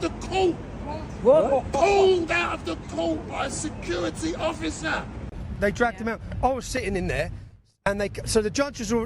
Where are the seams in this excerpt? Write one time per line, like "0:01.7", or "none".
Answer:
0:05.4